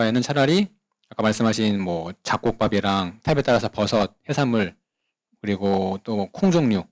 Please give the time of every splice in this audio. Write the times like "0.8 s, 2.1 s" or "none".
none